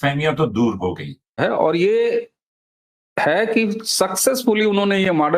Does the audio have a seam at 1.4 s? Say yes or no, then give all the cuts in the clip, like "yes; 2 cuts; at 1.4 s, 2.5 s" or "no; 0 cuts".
yes; 1 cut; at 1.4 s